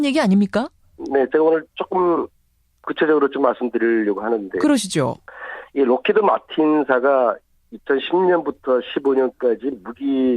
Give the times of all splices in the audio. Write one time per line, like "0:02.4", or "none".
0:01.4